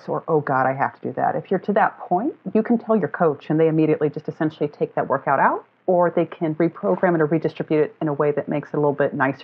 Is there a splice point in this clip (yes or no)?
no